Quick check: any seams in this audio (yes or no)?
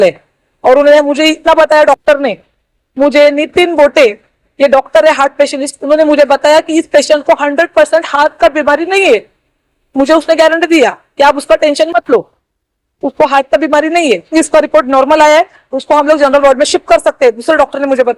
yes